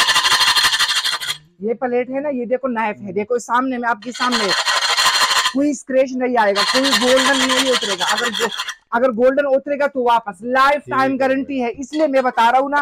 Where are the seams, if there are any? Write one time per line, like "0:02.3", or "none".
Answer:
none